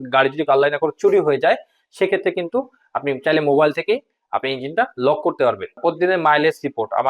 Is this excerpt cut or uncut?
cut